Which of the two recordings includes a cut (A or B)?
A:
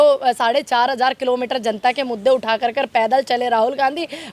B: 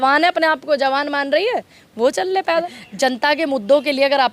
B